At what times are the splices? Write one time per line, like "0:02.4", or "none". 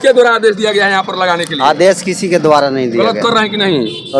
none